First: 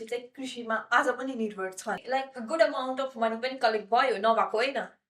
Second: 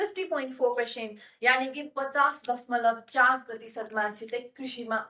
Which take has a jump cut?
first; 1 cut; at 1.9 s

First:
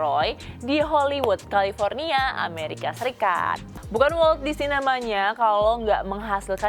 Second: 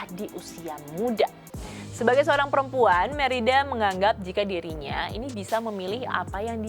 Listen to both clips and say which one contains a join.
first; 1 cut; at 3.7 s

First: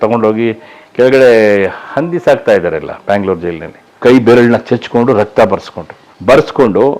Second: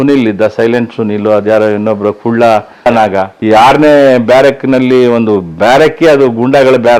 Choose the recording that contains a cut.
first; 1 cut; at 3.9 s

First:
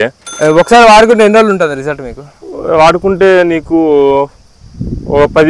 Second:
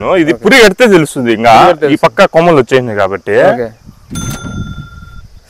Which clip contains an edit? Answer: second; 1 cut; at 3.9 s

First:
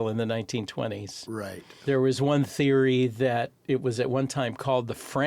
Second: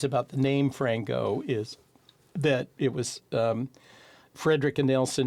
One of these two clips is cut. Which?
first; 1 cut; at 1.6 s

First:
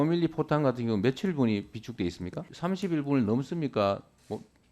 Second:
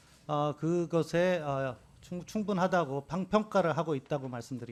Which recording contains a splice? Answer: first; 1 cut; at 2.5 s

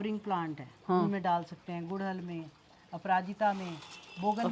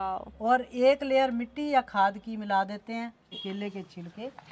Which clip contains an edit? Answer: second; 1 cut; at 3.3 s

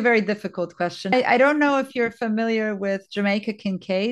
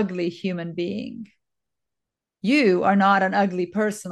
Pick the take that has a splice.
first; 1 cut; at 1.1 s

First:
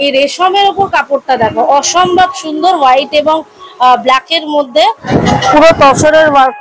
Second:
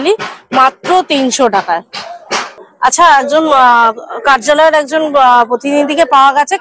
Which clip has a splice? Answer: first; 1 cut; at 5.1 s

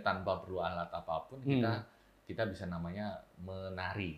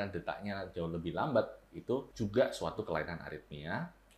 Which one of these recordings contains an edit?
second; 1 cut; at 2.1 s

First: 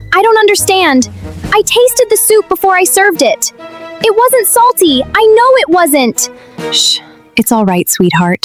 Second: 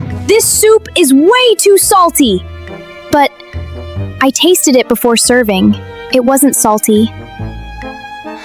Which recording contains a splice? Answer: second; 1 cut; at 7.1 s

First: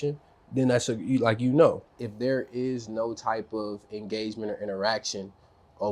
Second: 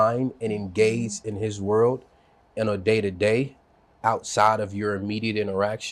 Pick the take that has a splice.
first; 1 cut; at 2.0 s

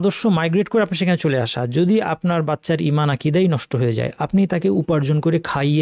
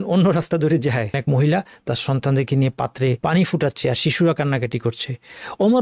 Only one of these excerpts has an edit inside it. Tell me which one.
second; 2 cuts; at 1.1 s, 3.2 s

